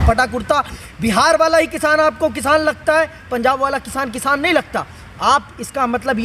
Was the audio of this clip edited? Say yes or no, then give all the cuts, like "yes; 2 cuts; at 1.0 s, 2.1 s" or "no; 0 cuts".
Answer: no; 0 cuts